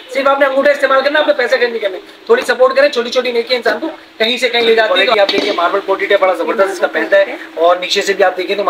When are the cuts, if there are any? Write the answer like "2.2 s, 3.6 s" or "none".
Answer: 5.0 s